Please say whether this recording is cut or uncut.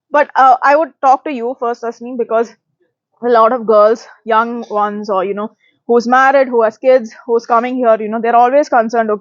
uncut